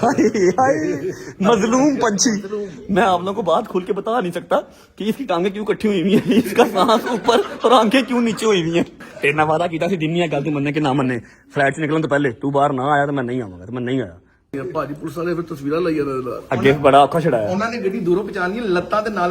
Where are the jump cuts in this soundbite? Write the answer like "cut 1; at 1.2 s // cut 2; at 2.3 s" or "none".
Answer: cut 1; at 9.0 s // cut 2; at 14.5 s